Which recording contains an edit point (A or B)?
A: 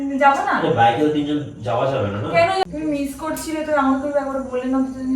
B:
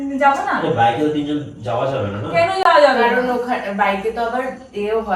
A